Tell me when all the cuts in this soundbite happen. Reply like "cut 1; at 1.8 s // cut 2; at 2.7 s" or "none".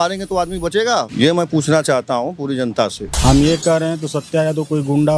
cut 1; at 1.1 s // cut 2; at 3.1 s